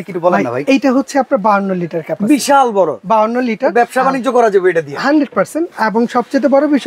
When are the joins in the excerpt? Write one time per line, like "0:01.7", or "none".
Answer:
none